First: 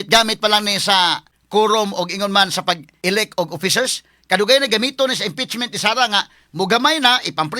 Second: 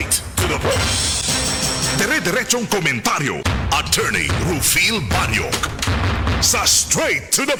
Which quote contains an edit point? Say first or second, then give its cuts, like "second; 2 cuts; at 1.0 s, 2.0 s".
first; 2 cuts; at 1.3 s, 2.9 s